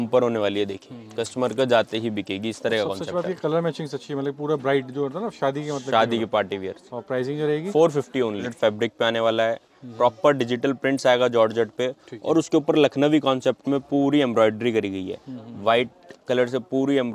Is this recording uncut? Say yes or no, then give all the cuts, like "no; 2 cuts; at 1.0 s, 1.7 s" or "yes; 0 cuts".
yes; 0 cuts